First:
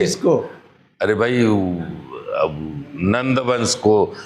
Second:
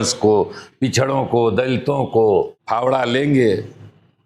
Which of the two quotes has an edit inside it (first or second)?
second